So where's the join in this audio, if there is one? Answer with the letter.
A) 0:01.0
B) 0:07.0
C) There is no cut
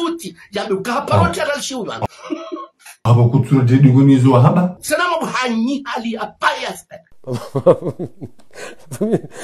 B